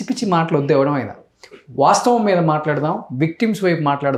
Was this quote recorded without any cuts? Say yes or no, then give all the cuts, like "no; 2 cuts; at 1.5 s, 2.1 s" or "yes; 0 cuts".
yes; 0 cuts